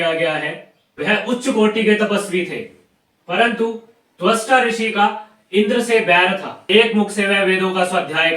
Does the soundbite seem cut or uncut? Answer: cut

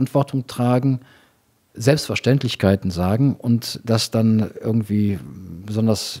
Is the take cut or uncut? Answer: uncut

